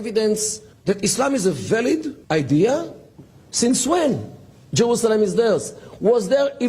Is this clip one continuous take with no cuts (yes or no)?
no